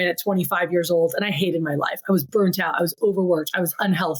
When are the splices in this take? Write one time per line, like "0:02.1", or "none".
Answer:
none